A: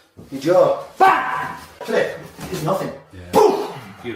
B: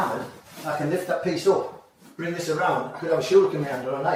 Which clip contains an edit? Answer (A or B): A